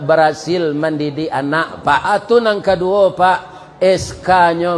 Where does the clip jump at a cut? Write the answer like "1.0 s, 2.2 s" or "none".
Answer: 2.0 s